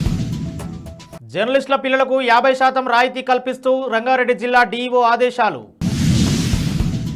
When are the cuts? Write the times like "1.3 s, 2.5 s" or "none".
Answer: 1.1 s